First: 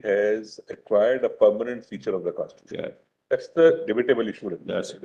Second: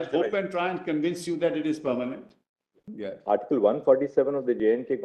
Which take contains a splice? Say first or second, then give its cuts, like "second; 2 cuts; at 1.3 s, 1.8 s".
second; 1 cut; at 2.9 s